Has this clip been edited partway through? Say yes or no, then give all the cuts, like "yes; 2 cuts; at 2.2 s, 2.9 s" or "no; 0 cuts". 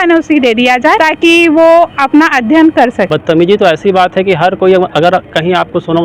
yes; 2 cuts; at 1.0 s, 3.1 s